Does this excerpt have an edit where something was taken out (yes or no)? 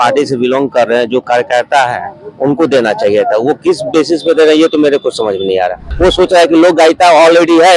yes